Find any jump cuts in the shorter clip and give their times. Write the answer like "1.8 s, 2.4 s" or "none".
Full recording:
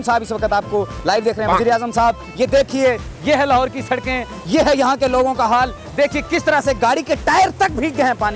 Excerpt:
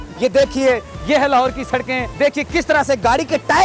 2.1 s